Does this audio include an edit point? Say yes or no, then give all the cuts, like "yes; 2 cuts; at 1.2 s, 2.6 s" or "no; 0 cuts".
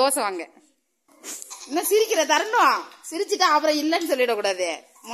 no; 0 cuts